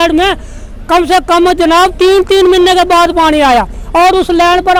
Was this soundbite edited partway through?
no; 0 cuts

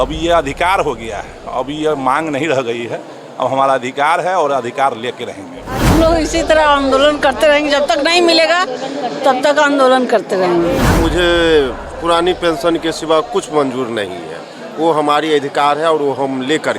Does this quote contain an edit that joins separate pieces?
yes; 2 cuts; at 5.9 s, 11.0 s

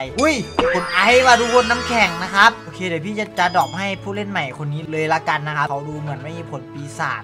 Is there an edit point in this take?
no; 0 cuts

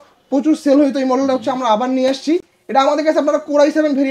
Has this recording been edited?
no; 0 cuts

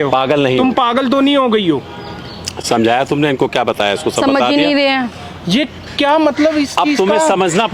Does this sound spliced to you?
no; 0 cuts

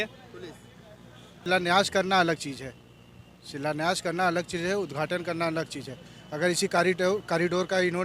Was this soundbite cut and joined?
yes; 1 cut; at 1.4 s

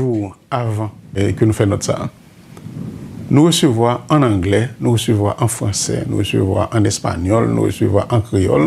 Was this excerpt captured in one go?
no; 1 cut; at 1.2 s

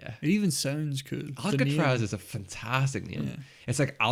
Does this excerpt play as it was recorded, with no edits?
yes; 0 cuts

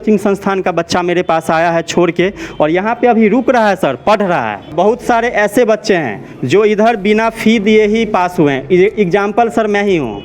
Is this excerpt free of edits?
no; 1 cut; at 4.7 s

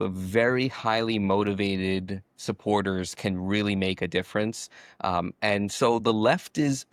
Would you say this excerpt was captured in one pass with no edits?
yes; 0 cuts

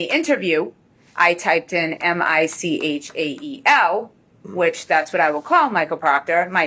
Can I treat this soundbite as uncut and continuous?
yes; 0 cuts

